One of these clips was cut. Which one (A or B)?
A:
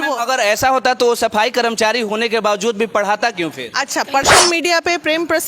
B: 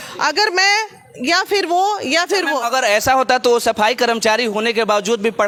A